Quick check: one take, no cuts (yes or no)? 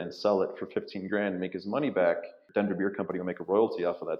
no